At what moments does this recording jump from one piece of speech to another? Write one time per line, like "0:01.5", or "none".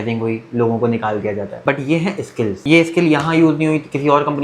0:01.5
0:02.6